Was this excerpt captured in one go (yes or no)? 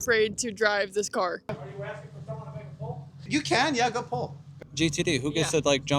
no